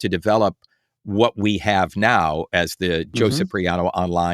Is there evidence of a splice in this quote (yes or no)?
no